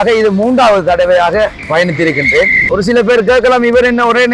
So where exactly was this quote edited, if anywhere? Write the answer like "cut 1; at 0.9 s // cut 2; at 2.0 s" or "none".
cut 1; at 1.6 s // cut 2; at 2.6 s